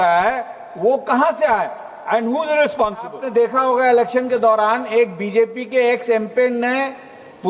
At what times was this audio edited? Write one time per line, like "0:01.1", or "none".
0:03.2